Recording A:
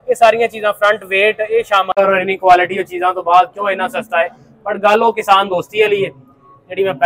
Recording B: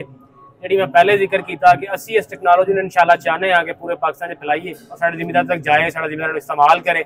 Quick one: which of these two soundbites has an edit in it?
A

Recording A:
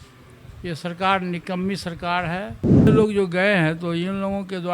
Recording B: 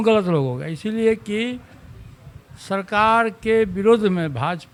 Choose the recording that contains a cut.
A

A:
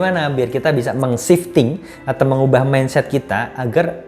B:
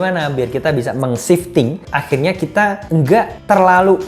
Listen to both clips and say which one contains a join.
B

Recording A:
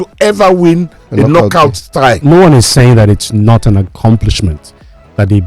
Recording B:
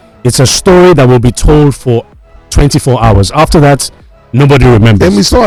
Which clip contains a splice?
A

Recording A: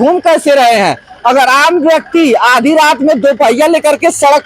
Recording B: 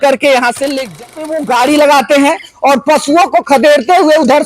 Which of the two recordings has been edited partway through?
B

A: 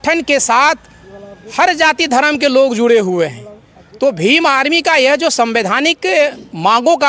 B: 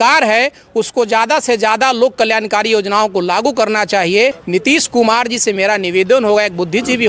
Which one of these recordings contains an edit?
B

